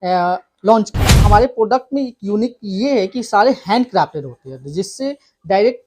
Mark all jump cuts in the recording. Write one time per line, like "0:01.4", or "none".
0:01.2